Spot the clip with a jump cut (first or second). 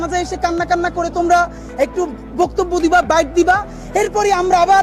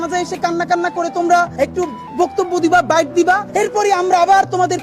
second